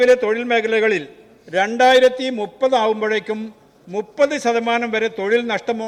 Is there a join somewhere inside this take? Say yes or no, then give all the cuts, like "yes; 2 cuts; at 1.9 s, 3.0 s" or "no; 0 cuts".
no; 0 cuts